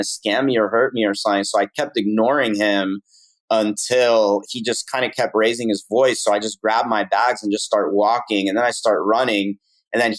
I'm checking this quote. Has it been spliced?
no; 0 cuts

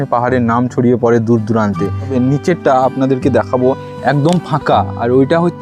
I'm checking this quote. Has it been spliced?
yes; 1 cut; at 2.0 s

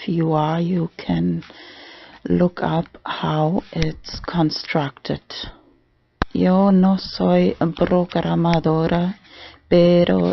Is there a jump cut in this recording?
yes; 1 cut; at 1.4 s

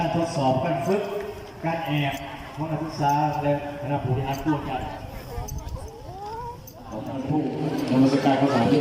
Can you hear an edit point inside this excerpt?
no; 0 cuts

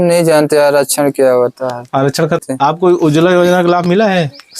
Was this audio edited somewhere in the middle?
yes; 1 cut; at 2.4 s

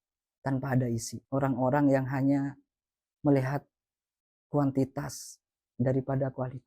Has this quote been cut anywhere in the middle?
yes; 1 cut; at 1.1 s

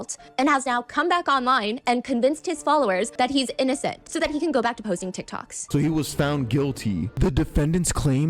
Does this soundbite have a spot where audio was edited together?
yes; 4 cuts; at 3.1 s, 4.0 s, 5.6 s, 7.1 s

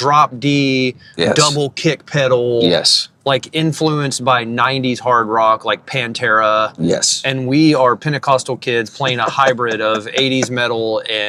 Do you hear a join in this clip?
no; 0 cuts

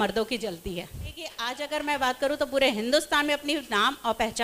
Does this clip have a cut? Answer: yes; 1 cut; at 1.5 s

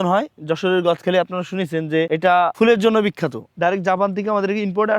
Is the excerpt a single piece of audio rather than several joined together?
no; 1 cut; at 3.5 s

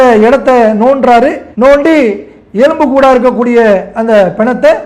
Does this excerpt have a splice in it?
yes; 1 cut; at 1.4 s

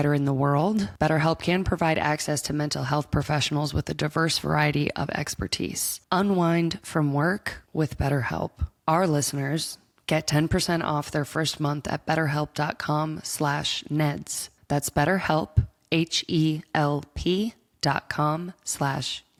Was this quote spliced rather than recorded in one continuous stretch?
no; 0 cuts

